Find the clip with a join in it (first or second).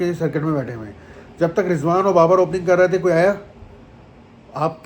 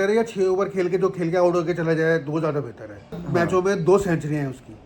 second